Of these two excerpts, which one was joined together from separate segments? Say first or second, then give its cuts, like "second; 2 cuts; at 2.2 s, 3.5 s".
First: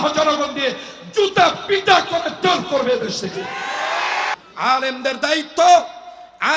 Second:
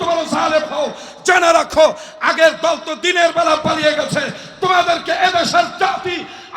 first; 1 cut; at 4.4 s